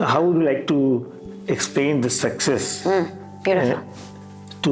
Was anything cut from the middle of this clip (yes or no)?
no